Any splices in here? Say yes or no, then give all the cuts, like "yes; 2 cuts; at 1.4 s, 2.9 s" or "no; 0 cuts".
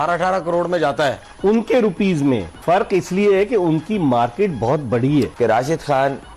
yes; 2 cuts; at 2.5 s, 5.3 s